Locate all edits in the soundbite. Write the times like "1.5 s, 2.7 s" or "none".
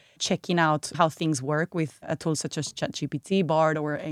2.0 s